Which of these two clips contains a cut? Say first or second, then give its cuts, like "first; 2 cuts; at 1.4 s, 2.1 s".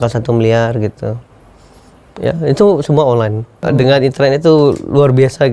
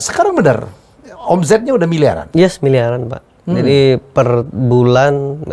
first; 1 cut; at 3.6 s